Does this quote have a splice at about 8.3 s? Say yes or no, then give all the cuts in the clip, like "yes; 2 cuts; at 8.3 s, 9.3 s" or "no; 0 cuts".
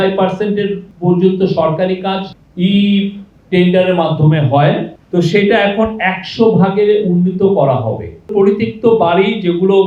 yes; 4 cuts; at 0.9 s, 2.3 s, 5.0 s, 8.3 s